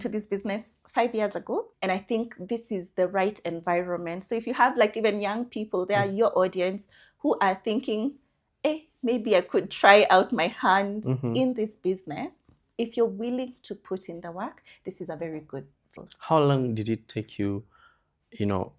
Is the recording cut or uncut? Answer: cut